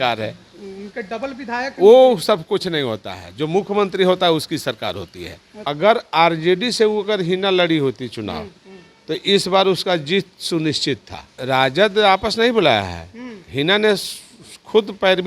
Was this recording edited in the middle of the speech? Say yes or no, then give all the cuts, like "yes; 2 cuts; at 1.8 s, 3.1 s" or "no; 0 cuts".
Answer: yes; 2 cuts; at 5.6 s, 11.3 s